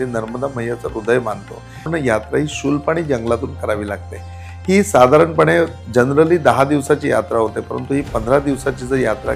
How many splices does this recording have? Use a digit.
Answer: 1